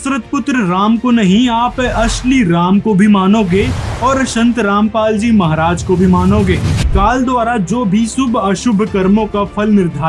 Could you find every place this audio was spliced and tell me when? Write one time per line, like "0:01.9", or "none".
0:06.8